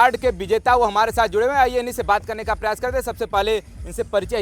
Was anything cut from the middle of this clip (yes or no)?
no